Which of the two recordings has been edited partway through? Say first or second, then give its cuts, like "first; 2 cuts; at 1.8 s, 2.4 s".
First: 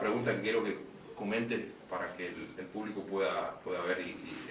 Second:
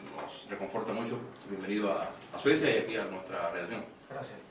first; 1 cut; at 1.5 s